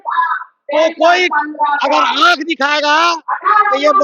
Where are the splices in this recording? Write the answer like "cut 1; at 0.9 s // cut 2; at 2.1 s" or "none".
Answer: none